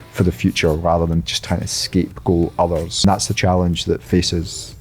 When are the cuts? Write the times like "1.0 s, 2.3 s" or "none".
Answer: 3.0 s